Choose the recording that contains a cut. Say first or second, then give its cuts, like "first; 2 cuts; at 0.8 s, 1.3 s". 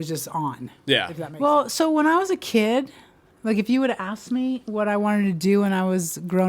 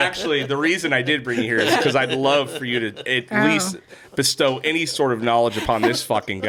first; 1 cut; at 1.3 s